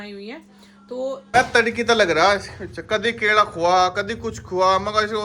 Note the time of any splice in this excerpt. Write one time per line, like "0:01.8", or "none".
0:01.3